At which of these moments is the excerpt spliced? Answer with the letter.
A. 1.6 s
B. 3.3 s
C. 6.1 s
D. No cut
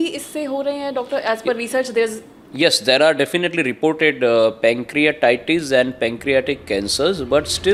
D